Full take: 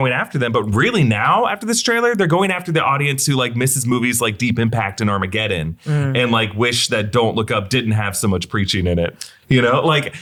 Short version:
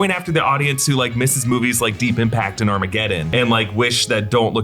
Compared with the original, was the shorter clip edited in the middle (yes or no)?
yes